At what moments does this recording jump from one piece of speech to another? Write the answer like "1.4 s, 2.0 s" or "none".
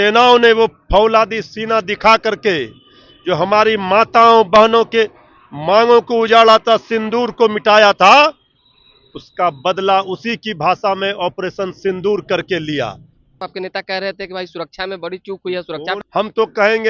13.4 s, 16.0 s